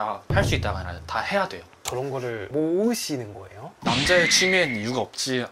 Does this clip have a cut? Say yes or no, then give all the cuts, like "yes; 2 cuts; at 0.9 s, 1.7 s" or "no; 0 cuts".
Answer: yes; 1 cut; at 1.9 s